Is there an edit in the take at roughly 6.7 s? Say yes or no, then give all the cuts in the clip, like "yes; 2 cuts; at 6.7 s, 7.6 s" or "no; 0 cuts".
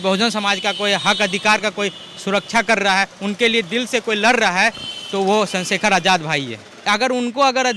yes; 1 cut; at 6.7 s